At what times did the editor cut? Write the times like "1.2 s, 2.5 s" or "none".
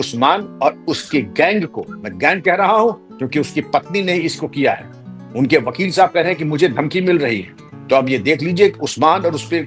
none